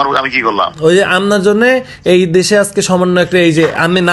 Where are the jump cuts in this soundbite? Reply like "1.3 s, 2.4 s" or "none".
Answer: none